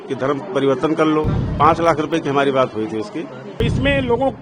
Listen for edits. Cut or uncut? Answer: cut